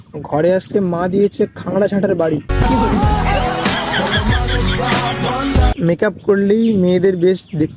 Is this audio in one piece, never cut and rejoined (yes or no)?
no